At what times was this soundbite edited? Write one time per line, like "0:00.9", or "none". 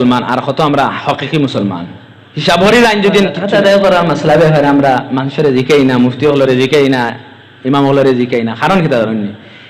0:03.4